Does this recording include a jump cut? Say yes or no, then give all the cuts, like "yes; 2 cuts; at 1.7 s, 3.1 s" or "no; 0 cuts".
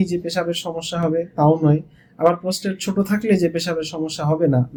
no; 0 cuts